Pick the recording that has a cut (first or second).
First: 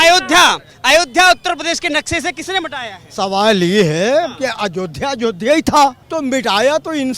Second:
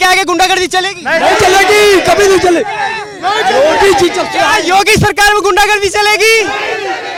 first